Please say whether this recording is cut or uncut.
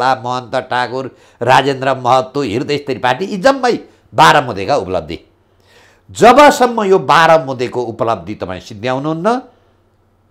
uncut